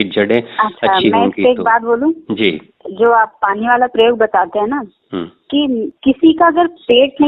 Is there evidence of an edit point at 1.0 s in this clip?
no; 2 cuts; at 2.8 s, 5.9 s

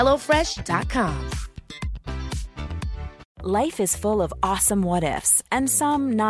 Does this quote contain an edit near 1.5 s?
no; 1 cut; at 3.2 s

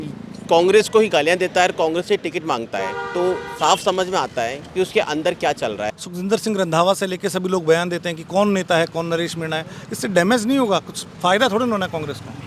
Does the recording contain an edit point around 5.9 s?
yes; 1 cut; at 5.9 s

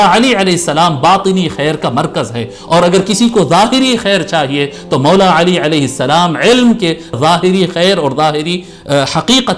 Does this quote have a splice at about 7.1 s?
yes; 1 cut; at 7.1 s

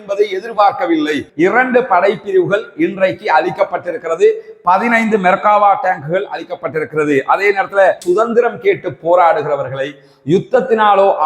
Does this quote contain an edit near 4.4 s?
no; 2 cuts; at 1.2 s, 8.0 s

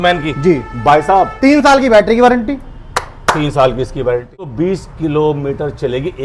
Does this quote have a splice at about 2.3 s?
no; 1 cut; at 4.5 s

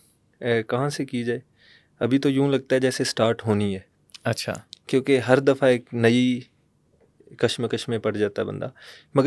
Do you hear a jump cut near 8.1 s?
no; 0 cuts

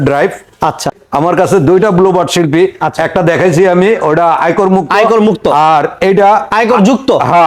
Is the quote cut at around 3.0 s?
no; 1 cut; at 1.0 s

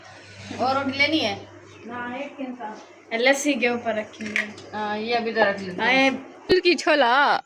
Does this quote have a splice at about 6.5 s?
yes; 1 cut; at 6.5 s

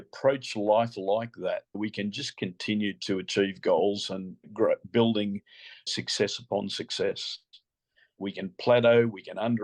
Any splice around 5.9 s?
yes; 4 cuts; at 1.8 s, 4.4 s, 5.9 s, 8.2 s

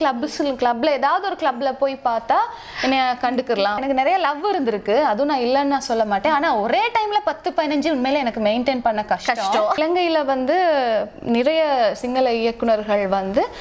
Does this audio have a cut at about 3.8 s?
yes; 2 cuts; at 3.8 s, 9.8 s

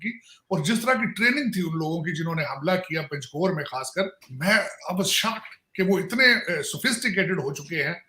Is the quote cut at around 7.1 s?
no; 1 cut; at 4.2 s

